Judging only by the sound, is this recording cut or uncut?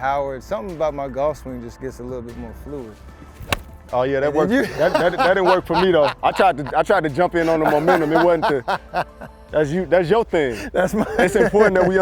uncut